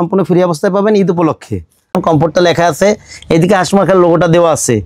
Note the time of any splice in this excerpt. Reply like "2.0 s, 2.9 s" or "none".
1.9 s